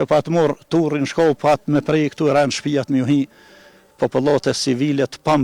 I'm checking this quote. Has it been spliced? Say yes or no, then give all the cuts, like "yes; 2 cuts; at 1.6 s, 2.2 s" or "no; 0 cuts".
no; 0 cuts